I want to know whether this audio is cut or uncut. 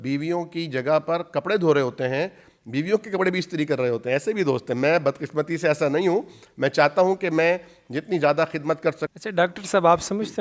cut